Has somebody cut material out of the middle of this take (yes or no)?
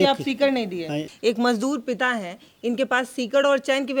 yes